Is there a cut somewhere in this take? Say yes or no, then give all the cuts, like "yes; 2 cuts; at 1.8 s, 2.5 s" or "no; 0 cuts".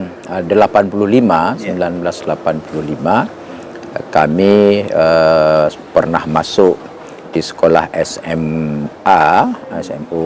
no; 0 cuts